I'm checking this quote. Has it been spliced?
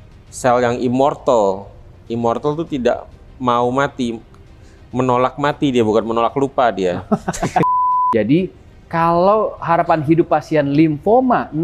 yes; 1 cut; at 7.7 s

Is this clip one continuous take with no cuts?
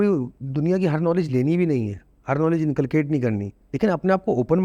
yes; 0 cuts

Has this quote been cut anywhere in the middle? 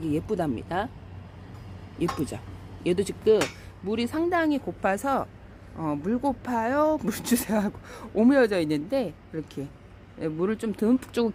no; 0 cuts

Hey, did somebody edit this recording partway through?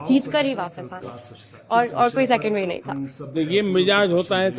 no; 0 cuts

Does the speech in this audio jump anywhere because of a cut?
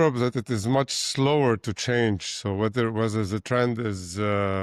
no; 0 cuts

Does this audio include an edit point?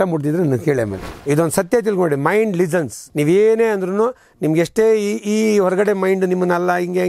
yes; 2 cuts; at 1.1 s, 3.0 s

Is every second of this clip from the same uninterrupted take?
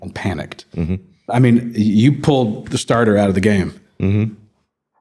no; 1 cut; at 1.3 s

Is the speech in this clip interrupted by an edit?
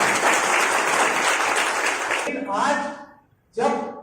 yes; 1 cut; at 2.3 s

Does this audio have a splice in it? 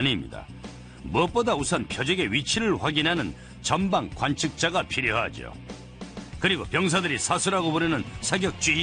no; 0 cuts

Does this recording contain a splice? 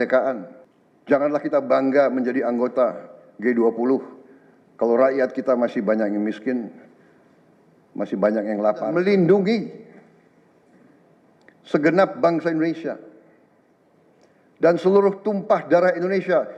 yes; 1 cut; at 8.9 s

